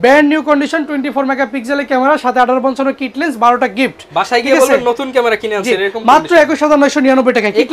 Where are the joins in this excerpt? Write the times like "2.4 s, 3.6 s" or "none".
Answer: none